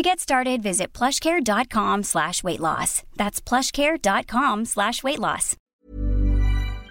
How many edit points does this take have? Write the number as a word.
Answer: one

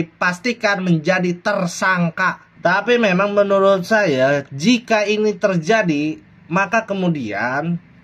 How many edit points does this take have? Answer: one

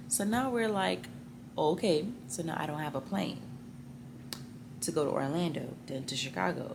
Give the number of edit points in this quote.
zero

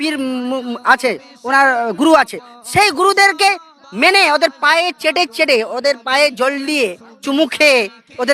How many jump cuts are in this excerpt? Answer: zero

